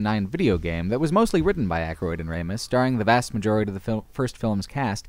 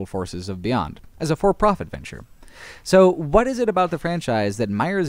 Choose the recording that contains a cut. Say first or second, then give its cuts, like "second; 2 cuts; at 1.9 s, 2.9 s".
second; 1 cut; at 3.5 s